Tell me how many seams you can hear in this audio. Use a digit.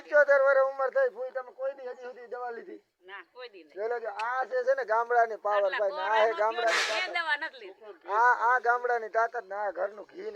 0